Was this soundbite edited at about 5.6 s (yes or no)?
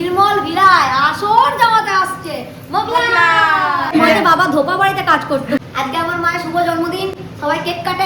yes